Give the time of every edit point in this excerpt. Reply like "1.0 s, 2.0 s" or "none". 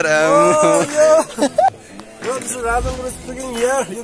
1.8 s